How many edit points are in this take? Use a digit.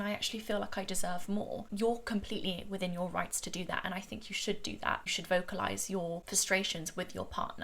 0